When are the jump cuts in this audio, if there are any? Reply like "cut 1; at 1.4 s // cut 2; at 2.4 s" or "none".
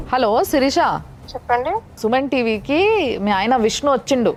none